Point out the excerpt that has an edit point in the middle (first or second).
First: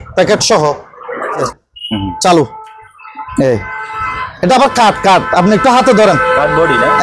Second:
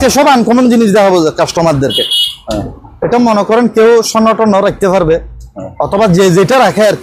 first